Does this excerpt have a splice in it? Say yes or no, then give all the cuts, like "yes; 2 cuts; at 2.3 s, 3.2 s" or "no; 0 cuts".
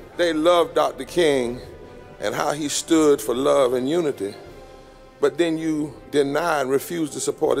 no; 0 cuts